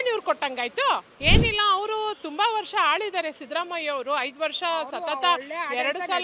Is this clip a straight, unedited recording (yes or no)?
no